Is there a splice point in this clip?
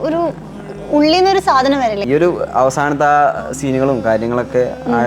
yes; 1 cut; at 2.0 s

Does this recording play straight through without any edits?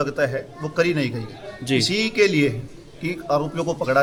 yes; 0 cuts

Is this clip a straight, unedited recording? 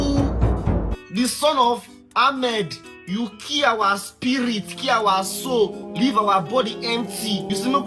no; 2 cuts; at 1.0 s, 2.8 s

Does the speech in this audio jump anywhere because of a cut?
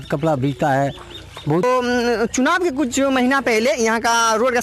yes; 1 cut; at 1.6 s

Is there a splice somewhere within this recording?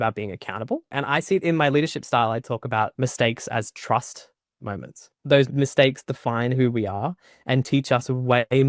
yes; 3 cuts; at 1.0 s, 2.9 s, 5.4 s

